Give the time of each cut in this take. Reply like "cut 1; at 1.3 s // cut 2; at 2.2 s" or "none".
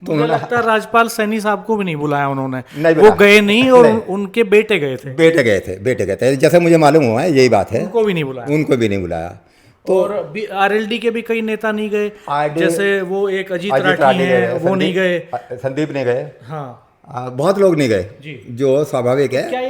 none